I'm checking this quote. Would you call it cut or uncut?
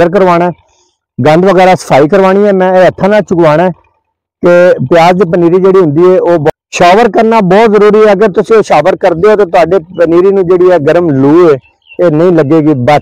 cut